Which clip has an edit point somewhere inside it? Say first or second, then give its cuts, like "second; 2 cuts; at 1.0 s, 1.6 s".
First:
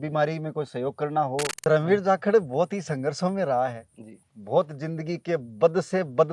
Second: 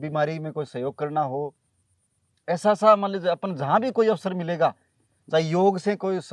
first; 1 cut; at 1.6 s